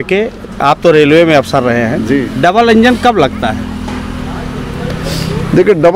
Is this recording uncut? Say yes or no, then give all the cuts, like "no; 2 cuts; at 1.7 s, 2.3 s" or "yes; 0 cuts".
yes; 0 cuts